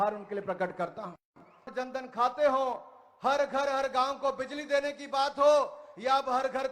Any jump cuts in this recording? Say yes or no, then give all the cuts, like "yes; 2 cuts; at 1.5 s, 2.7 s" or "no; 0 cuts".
yes; 1 cut; at 1.7 s